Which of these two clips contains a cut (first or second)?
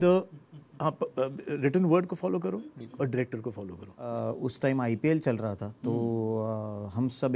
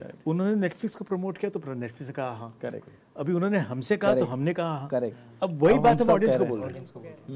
first